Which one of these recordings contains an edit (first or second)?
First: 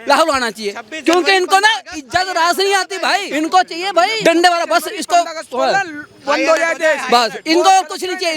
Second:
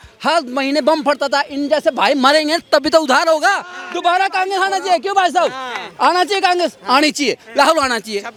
first